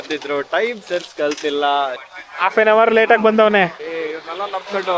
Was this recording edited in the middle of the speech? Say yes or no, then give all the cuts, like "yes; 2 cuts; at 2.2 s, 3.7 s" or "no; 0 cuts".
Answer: yes; 2 cuts; at 1.9 s, 3.8 s